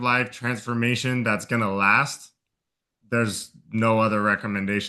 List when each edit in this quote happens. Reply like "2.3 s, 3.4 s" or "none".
none